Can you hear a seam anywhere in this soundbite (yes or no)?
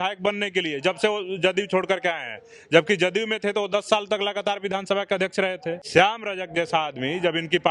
yes